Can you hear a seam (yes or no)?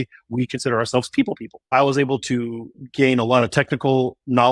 yes